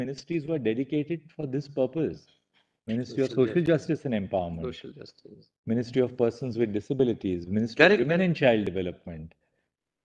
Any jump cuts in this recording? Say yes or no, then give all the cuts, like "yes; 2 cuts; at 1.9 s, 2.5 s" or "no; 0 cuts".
no; 0 cuts